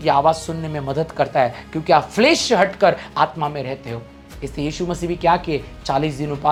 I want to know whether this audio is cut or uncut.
uncut